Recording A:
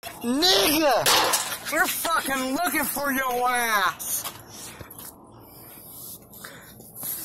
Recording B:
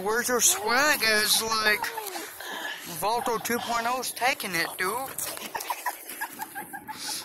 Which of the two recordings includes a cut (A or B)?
B